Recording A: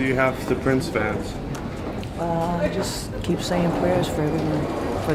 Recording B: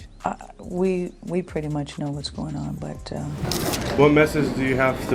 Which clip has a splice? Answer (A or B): B